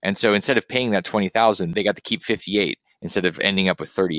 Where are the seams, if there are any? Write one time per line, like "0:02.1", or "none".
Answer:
0:01.7